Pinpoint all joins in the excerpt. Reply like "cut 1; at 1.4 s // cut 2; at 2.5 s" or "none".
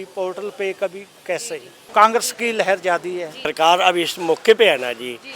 cut 1; at 1.8 s // cut 2; at 3.4 s